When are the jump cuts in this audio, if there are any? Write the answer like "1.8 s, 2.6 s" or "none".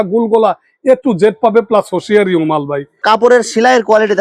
3.0 s